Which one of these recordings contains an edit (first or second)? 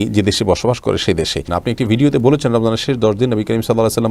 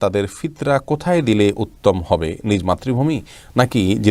first